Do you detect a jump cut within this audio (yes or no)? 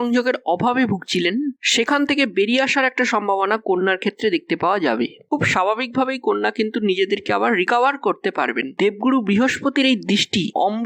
no